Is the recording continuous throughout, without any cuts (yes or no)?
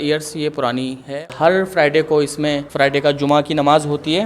no